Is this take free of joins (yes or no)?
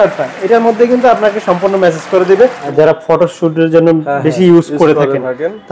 no